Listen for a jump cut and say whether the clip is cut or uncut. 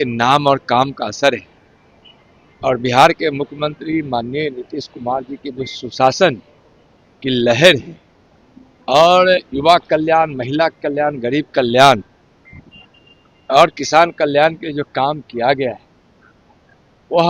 uncut